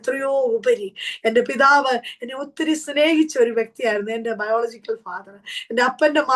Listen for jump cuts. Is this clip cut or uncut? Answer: uncut